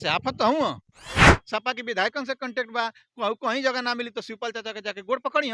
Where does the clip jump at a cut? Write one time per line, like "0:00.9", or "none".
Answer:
0:01.2